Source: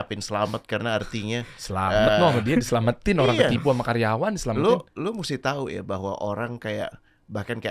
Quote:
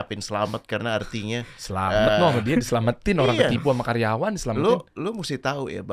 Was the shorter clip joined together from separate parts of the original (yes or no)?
no